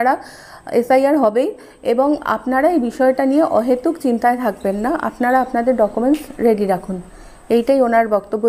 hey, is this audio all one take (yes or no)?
yes